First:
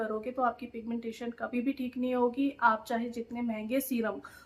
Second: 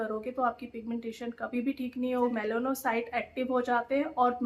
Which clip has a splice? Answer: second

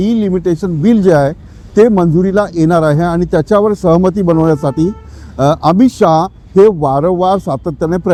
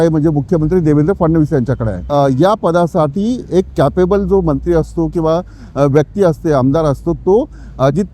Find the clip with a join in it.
second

